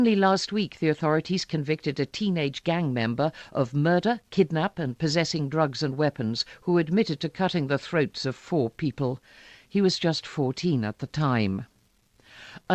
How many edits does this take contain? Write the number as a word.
one